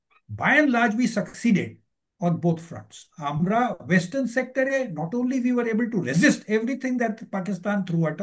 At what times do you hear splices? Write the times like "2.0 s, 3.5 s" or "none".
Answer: none